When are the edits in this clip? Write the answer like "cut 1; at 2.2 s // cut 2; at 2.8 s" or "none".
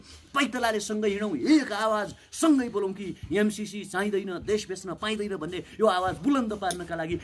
none